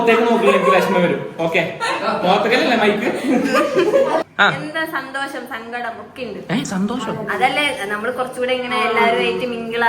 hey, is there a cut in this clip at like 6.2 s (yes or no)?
no